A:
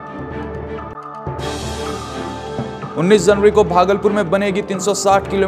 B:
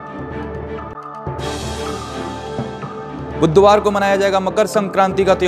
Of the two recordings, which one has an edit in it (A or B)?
A